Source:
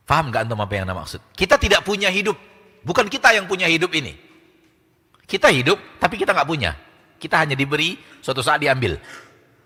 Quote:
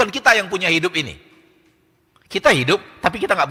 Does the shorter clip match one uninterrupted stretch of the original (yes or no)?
yes